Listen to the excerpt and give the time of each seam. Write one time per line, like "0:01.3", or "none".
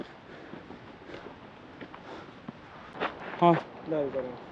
0:03.2